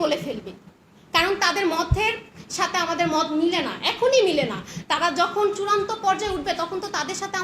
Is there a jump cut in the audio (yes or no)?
no